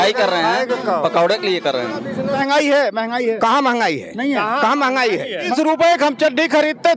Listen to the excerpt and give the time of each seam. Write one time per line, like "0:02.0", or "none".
0:02.4
0:05.4